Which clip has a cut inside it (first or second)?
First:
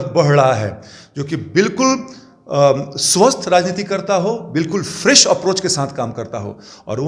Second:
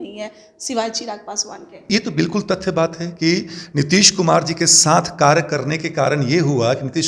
second